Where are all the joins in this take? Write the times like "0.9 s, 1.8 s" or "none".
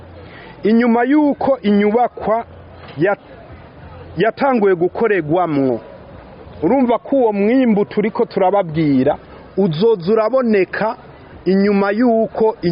none